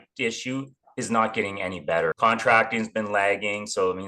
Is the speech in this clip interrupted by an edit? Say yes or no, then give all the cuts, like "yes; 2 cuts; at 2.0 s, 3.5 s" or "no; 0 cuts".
yes; 1 cut; at 2.2 s